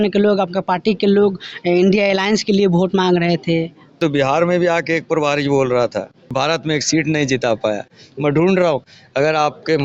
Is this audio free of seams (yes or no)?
no